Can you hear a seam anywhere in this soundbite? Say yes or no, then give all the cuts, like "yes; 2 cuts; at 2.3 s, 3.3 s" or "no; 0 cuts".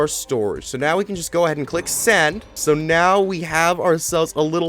yes; 1 cut; at 2.6 s